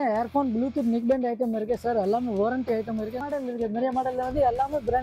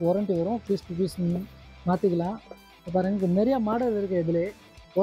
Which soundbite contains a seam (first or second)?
first